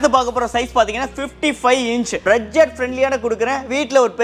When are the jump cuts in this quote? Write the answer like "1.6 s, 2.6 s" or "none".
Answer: 2.2 s